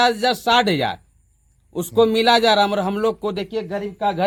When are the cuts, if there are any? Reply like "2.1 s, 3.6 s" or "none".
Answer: none